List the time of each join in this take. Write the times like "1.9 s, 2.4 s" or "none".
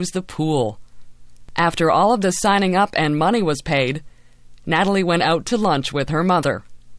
none